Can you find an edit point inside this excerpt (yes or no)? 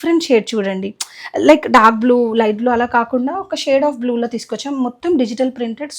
no